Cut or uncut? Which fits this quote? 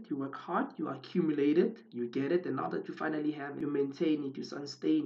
uncut